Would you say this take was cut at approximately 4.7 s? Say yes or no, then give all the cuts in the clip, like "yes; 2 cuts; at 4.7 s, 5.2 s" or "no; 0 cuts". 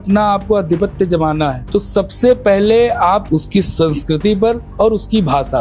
yes; 3 cuts; at 1.6 s, 3.2 s, 4.7 s